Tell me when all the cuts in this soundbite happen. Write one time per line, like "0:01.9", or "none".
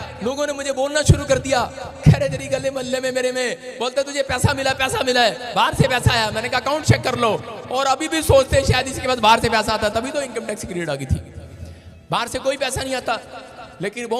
none